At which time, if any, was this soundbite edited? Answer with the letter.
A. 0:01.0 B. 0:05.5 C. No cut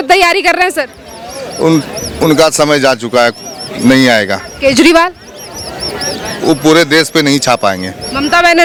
C